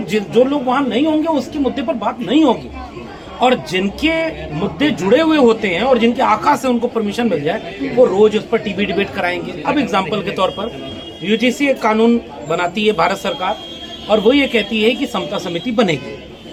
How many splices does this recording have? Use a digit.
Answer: 0